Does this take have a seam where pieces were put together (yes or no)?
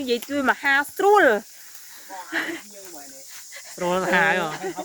no